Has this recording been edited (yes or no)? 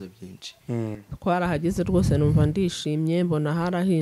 yes